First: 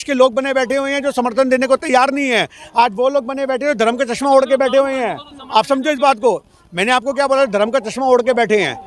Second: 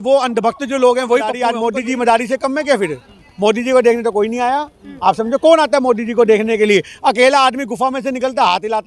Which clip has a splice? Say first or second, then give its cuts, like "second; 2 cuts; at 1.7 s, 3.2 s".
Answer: second; 1 cut; at 1.4 s